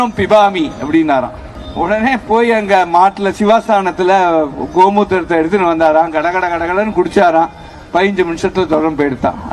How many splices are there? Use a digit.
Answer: 0